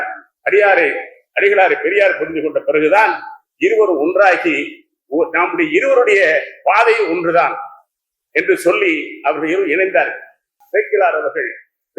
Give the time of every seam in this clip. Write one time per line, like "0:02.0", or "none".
0:10.6